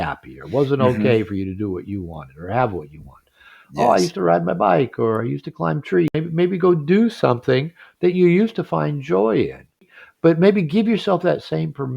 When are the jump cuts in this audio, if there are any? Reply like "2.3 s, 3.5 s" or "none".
6.1 s, 10.0 s